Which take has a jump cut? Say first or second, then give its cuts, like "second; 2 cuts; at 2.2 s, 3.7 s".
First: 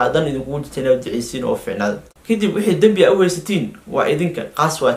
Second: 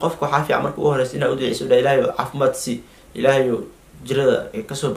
first; 1 cut; at 2.1 s